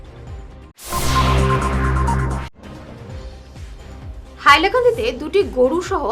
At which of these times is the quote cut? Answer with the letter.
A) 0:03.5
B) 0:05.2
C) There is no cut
A